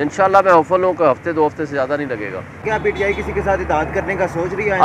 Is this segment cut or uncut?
cut